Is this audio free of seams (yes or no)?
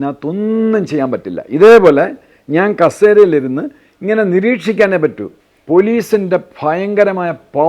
no